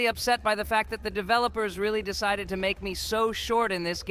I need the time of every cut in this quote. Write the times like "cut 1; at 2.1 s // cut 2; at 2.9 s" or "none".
none